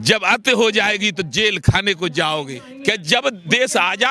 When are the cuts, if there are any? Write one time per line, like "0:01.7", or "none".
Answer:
0:02.6